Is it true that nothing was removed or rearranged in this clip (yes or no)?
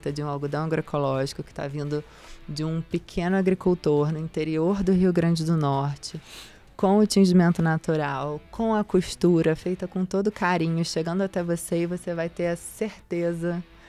yes